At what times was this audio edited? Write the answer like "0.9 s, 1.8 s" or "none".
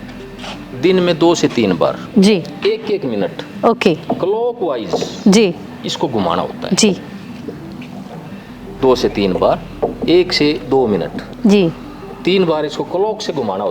none